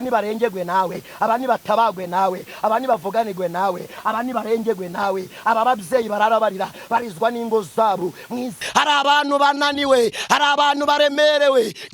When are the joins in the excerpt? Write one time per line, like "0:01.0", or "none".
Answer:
0:08.6